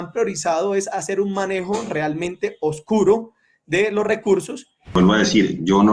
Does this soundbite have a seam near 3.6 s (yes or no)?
no